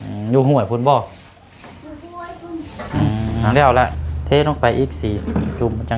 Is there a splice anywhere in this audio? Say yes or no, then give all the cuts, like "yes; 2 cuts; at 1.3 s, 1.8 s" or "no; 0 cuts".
yes; 1 cut; at 4.1 s